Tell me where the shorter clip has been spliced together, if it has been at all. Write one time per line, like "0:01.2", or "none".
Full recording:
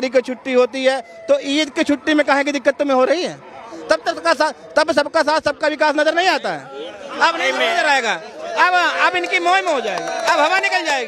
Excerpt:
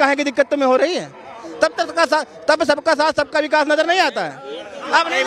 none